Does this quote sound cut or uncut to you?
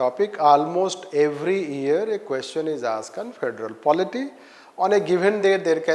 uncut